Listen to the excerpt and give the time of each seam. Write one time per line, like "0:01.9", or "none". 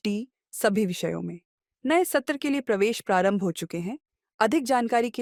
none